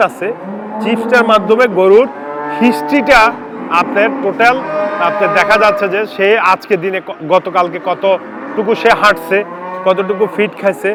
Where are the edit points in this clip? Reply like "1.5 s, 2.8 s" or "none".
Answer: none